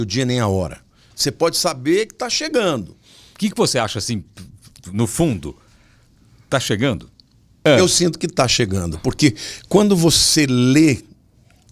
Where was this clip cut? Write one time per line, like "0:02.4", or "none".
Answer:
0:07.5